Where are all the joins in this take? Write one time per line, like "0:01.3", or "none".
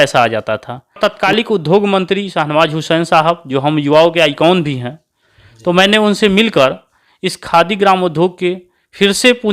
0:01.0